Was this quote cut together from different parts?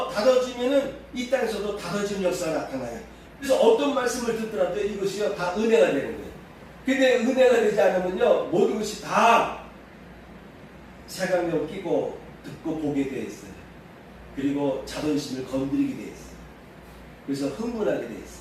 yes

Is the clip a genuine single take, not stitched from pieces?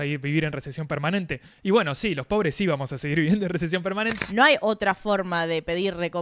no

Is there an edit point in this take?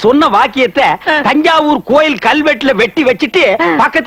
no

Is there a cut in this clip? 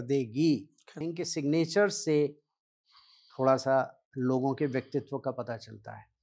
yes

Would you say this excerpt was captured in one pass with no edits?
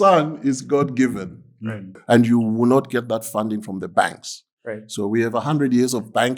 no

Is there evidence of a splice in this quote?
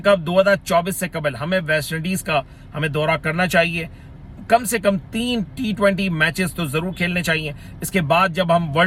no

